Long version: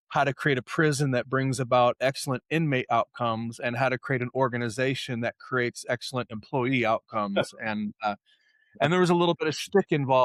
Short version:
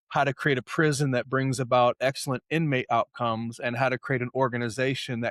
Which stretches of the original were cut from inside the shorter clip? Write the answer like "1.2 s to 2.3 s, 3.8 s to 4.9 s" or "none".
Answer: none